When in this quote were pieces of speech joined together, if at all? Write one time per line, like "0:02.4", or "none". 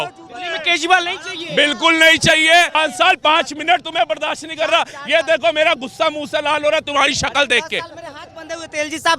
0:02.7